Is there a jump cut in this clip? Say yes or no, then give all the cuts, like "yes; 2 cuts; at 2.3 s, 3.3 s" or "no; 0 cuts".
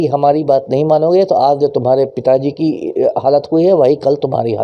no; 0 cuts